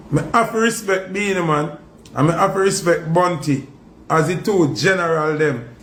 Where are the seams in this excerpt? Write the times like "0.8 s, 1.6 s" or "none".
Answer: none